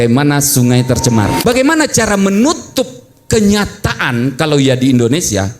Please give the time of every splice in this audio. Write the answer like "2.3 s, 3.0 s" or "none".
1.4 s